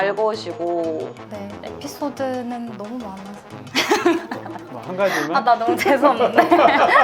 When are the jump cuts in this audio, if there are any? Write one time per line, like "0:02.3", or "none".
0:01.2